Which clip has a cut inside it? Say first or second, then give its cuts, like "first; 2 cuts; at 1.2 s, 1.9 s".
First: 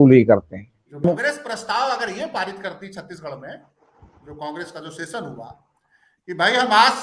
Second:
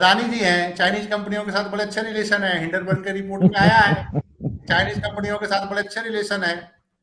first; 1 cut; at 1.0 s